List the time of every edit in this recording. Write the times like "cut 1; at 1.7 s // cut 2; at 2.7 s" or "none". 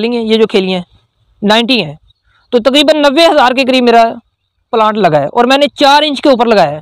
none

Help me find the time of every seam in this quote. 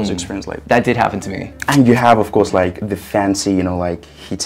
cut 1; at 1.6 s

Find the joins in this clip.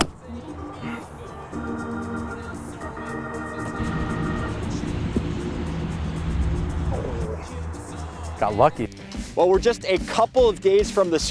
cut 1; at 8.8 s

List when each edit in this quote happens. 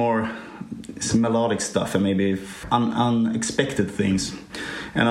cut 1; at 2.6 s

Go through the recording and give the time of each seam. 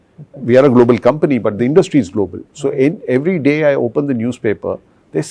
none

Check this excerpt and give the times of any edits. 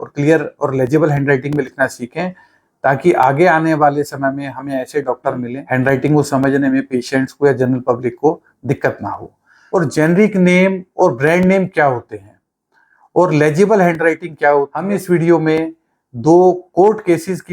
cut 1; at 5.5 s // cut 2; at 9.6 s // cut 3; at 15.0 s

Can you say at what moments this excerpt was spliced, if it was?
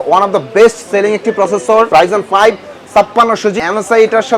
cut 1; at 1.9 s // cut 2; at 3.6 s

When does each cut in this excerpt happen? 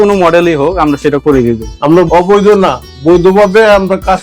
cut 1; at 1.7 s

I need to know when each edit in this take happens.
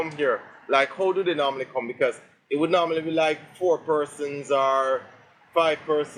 none

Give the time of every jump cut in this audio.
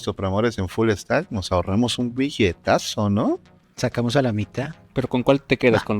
cut 1; at 4.9 s

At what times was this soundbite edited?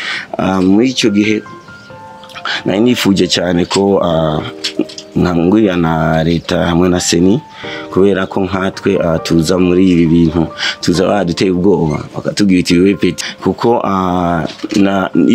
cut 1; at 13.2 s

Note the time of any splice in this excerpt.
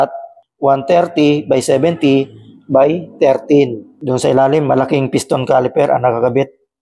cut 1; at 3.9 s

